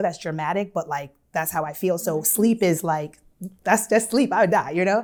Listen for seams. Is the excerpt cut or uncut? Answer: uncut